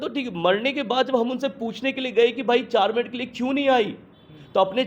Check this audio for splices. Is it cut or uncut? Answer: uncut